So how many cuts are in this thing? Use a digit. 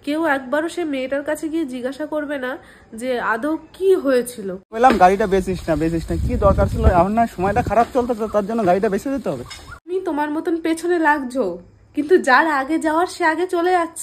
2